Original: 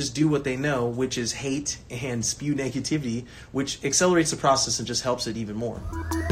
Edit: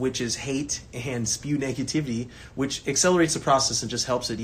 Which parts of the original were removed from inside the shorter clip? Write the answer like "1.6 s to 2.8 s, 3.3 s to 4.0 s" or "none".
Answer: none